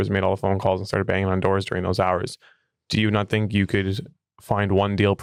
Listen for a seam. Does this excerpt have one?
no; 0 cuts

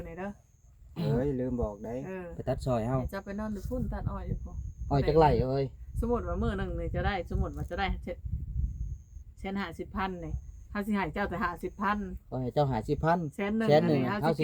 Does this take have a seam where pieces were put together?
no; 0 cuts

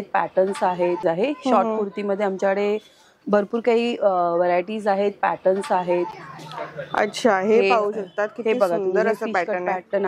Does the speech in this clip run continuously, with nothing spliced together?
yes; 0 cuts

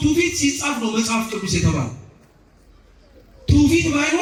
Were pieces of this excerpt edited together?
no; 0 cuts

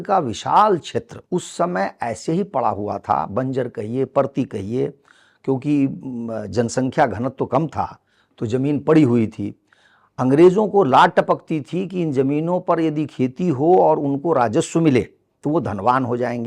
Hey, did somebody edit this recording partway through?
yes; 1 cut; at 1.2 s

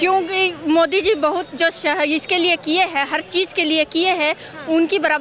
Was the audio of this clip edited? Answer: no; 0 cuts

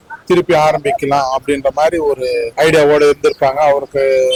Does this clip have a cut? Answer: no; 0 cuts

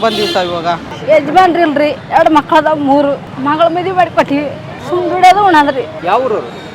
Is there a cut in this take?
yes; 5 cuts; at 0.9 s, 2.0 s, 3.3 s, 4.7 s, 5.9 s

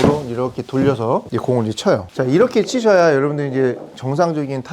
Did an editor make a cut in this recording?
yes; 2 cuts; at 1.3 s, 2.1 s

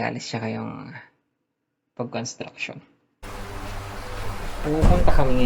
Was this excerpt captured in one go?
yes; 0 cuts

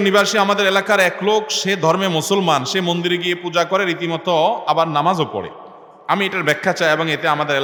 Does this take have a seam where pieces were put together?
no; 0 cuts

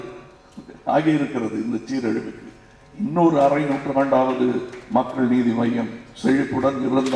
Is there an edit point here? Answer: no; 0 cuts

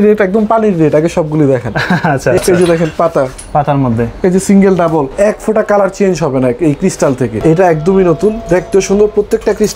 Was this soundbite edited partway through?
yes; 3 cuts; at 2.4 s, 5.1 s, 7.4 s

